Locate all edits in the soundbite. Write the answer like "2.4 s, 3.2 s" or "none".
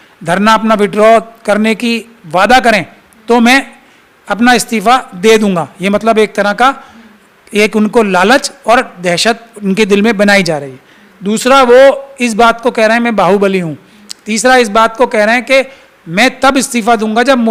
none